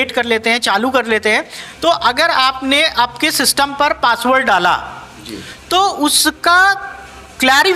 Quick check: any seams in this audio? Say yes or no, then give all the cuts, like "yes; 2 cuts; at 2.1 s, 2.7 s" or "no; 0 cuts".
no; 0 cuts